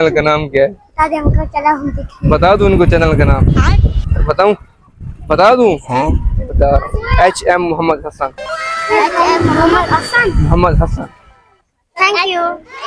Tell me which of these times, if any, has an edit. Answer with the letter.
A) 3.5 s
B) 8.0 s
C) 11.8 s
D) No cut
D